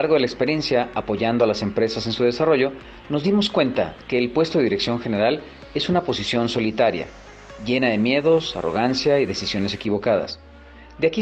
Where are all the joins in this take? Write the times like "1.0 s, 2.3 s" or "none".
4.8 s